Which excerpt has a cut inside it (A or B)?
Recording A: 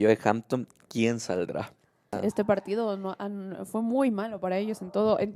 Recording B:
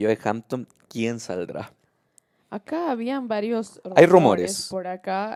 A